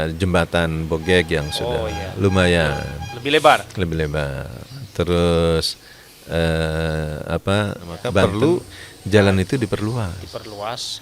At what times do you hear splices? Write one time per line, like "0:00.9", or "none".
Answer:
0:08.2